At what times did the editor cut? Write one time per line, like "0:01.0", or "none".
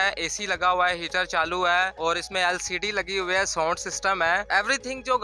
0:01.9
0:04.4